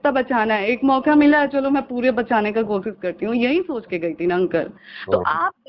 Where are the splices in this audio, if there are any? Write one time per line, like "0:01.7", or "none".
none